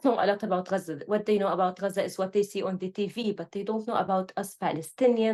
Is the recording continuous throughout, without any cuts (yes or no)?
yes